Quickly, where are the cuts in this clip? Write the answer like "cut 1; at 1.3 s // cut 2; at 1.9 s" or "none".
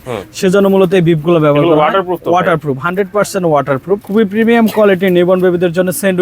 cut 1; at 4.0 s